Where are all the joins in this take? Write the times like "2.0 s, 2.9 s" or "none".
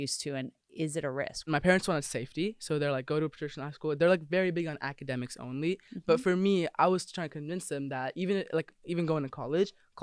1.5 s